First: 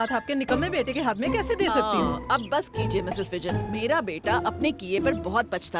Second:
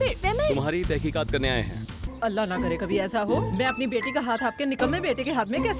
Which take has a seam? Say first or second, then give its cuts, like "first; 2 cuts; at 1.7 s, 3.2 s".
second; 1 cut; at 2.1 s